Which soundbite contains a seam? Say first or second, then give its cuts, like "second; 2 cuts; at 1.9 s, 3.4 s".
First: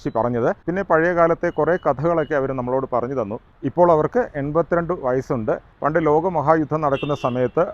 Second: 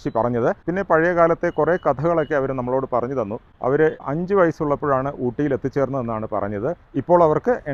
first; 2 cuts; at 3.5 s, 5.7 s